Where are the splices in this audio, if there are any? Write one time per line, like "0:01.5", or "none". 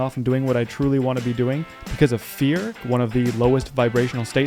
0:02.8